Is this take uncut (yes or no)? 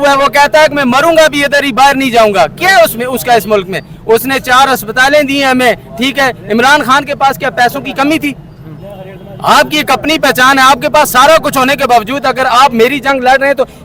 yes